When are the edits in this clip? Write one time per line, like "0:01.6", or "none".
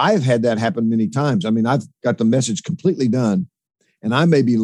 none